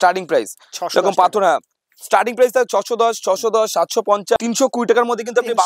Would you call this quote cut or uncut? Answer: cut